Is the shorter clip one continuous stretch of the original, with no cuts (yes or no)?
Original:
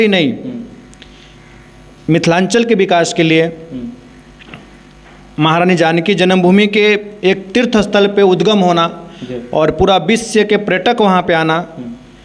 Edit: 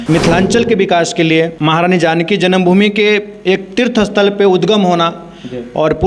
no